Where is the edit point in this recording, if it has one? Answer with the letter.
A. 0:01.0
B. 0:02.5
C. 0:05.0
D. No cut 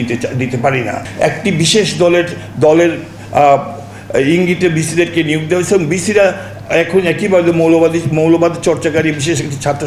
A